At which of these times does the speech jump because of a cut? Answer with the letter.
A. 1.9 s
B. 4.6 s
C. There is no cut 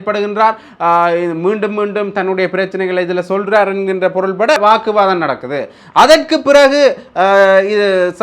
B